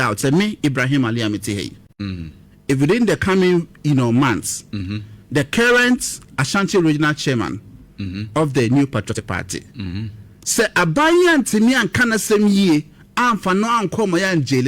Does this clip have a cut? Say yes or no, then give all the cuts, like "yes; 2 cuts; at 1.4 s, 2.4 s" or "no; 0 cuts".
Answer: yes; 1 cut; at 7.2 s